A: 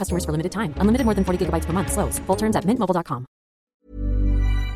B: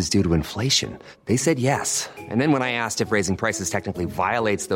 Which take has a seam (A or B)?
A